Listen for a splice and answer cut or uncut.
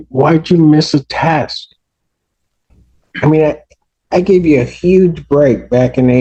uncut